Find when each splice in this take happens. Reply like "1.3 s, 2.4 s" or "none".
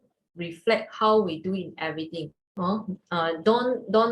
2.4 s